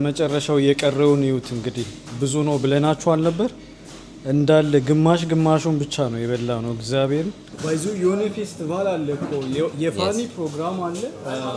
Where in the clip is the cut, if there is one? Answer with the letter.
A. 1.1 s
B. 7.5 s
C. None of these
B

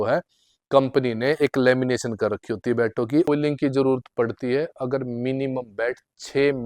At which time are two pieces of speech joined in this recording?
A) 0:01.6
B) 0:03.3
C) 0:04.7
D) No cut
B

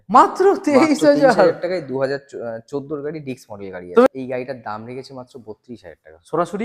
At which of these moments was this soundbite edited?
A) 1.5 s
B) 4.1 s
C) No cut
B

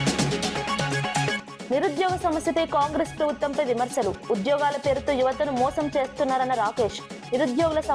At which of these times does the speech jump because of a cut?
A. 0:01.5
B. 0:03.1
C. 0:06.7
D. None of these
A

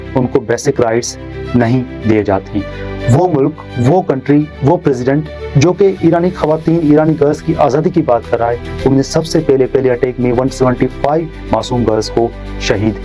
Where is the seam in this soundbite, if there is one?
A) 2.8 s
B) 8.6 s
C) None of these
A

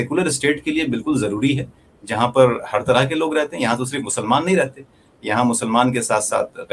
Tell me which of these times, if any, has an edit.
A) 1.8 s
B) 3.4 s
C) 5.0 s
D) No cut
D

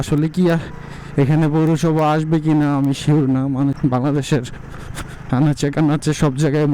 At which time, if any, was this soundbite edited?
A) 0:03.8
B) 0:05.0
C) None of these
A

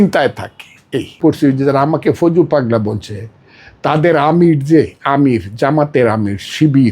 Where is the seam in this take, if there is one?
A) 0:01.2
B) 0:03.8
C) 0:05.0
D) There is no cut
A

